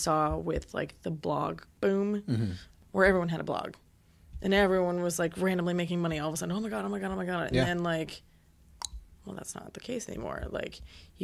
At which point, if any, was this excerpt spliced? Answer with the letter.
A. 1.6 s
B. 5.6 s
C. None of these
A